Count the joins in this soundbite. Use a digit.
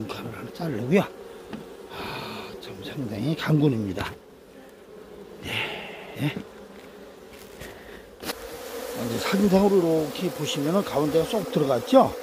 1